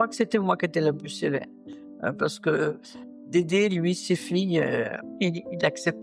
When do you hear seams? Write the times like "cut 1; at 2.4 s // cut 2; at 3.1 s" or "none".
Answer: cut 1; at 3.3 s